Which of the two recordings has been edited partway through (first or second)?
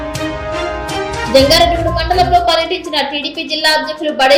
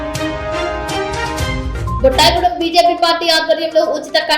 second